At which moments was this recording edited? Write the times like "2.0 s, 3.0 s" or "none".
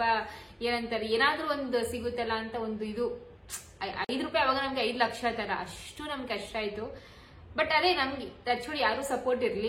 none